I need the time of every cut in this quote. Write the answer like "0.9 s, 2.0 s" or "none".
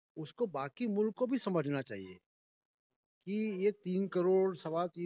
none